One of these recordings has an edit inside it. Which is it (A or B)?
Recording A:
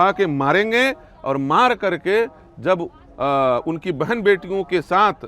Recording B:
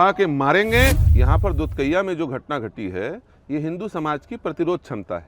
B